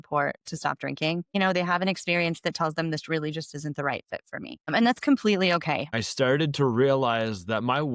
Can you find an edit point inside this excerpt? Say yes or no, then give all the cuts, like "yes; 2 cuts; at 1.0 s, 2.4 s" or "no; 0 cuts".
yes; 3 cuts; at 1.3 s, 4.7 s, 5.9 s